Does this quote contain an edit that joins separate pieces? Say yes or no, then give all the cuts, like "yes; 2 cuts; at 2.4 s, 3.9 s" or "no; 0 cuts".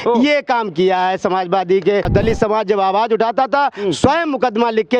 yes; 1 cut; at 2.1 s